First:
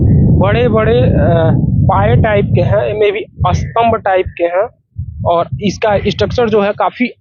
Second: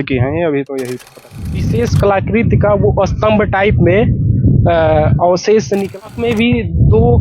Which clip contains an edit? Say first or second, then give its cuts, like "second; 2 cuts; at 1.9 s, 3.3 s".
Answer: second; 2 cuts; at 1.4 s, 6.0 s